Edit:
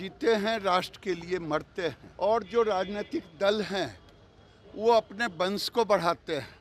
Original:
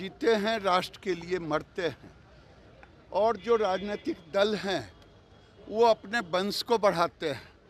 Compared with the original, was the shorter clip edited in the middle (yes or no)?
yes